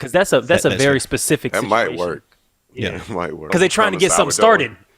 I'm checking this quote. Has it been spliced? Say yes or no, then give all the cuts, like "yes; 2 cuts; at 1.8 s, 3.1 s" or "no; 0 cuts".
yes; 1 cut; at 3.5 s